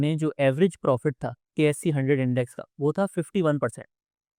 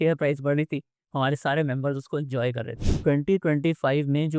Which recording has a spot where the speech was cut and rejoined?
second; 1 cut; at 2.9 s

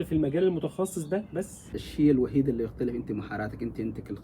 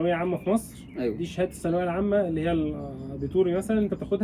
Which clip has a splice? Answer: first; 1 cut; at 1.7 s

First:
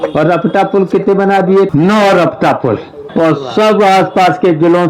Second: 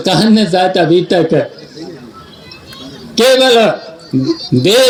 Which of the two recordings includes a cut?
first; 2 cuts; at 1.7 s, 3.0 s

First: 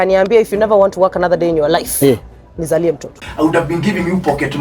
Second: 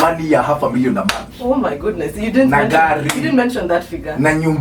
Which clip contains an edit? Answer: first; 1 cut; at 3.2 s

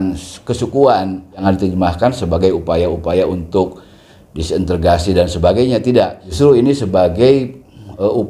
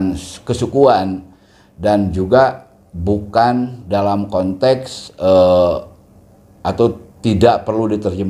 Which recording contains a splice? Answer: first; 2 cuts; at 1.4 s, 6.2 s

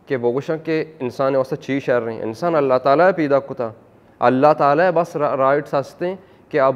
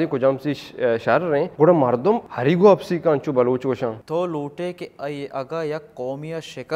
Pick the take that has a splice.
second; 3 cuts; at 1.5 s, 2.3 s, 4.0 s

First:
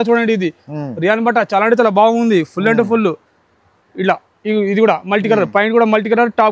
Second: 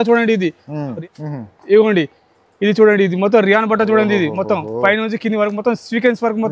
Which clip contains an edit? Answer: second; 1 cut; at 1.0 s

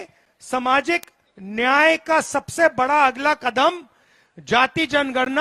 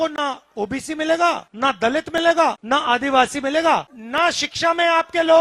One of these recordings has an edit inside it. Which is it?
second; 3 cuts; at 1.5 s, 2.6 s, 4.0 s

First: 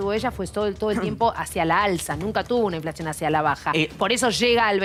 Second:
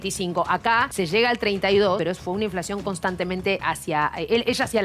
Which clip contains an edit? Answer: second; 3 cuts; at 0.9 s, 2.0 s, 3.6 s

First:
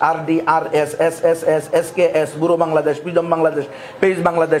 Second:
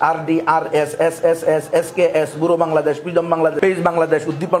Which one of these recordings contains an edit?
second; 1 cut; at 3.6 s

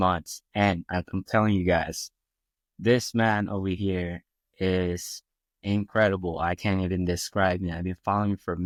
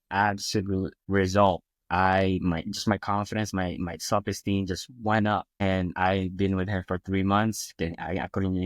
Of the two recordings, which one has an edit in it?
second; 2 cuts; at 1.0 s, 5.6 s

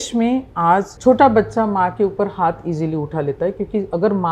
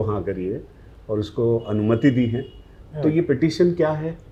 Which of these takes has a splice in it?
first; 1 cut; at 0.9 s

